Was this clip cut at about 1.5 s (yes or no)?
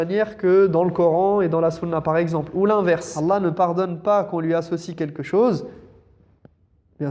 no